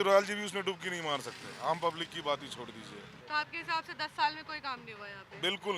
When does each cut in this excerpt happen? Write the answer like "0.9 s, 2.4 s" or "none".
none